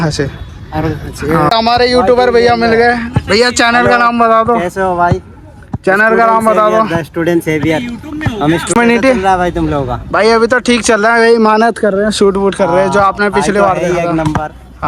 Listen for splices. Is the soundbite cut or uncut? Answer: cut